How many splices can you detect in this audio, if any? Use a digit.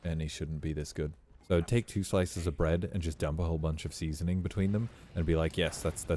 1